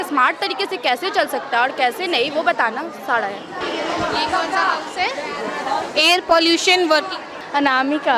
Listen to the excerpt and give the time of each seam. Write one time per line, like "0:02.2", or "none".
none